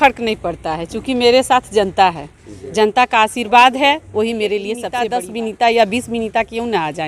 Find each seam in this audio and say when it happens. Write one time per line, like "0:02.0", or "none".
0:04.9